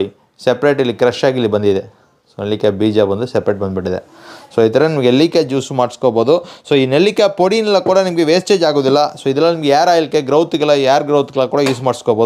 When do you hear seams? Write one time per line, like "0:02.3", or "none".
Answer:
none